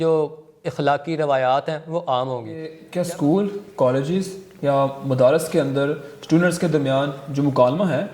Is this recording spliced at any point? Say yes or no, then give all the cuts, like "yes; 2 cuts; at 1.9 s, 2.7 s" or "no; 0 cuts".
yes; 1 cut; at 2.8 s